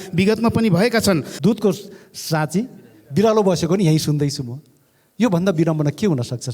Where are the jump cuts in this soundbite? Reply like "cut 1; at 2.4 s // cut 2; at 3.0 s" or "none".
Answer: cut 1; at 1.3 s